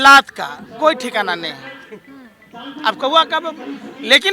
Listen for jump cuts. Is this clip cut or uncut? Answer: uncut